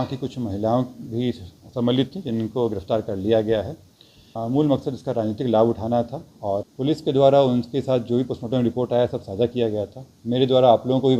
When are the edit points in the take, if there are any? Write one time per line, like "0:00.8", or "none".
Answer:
0:04.3
0:06.6